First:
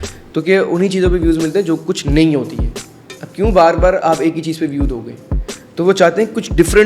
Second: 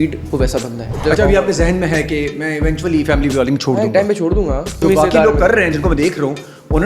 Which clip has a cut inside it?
second; 2 cuts; at 0.9 s, 4.8 s

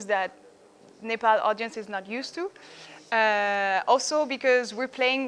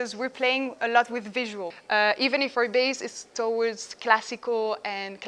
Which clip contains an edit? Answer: second; 1 cut; at 1.7 s

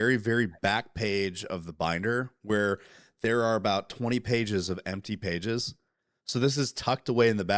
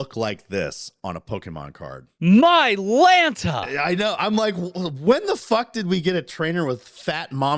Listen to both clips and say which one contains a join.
second; 1 cut; at 2.1 s

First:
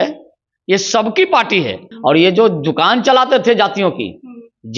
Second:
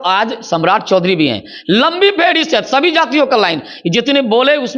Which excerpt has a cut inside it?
first; 1 cut; at 1.8 s

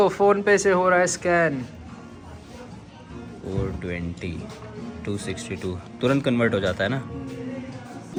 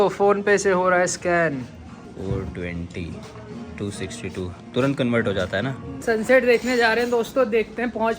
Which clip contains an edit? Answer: second; 2 cuts; at 2.1 s, 5.9 s

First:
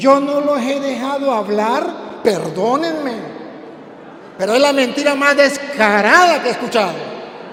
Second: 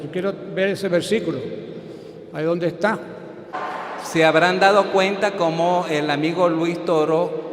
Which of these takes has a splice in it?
second; 1 cut; at 3.6 s

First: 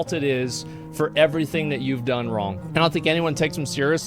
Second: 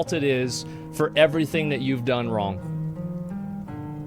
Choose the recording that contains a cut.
first; 1 cut; at 2.6 s

